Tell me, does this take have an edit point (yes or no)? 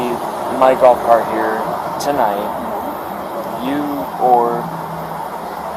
no